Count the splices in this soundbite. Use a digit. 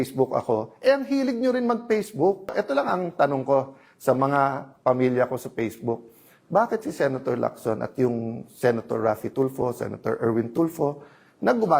1